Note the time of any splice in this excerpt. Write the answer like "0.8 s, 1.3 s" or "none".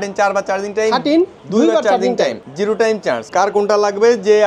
1.4 s, 3.2 s